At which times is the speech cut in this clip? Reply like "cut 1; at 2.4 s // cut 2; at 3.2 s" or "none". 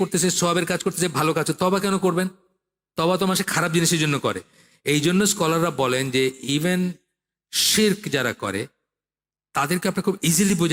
none